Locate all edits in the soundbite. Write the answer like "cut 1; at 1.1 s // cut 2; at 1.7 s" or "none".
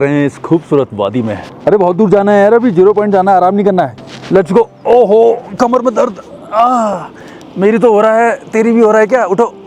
cut 1; at 1.4 s // cut 2; at 4.0 s